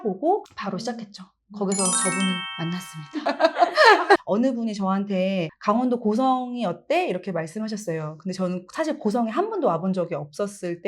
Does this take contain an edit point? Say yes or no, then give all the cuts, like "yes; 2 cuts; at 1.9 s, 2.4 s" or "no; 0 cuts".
yes; 1 cut; at 4.2 s